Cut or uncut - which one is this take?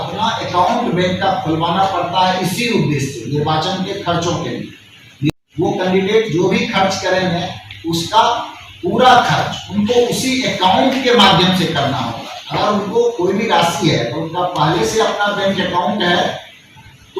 cut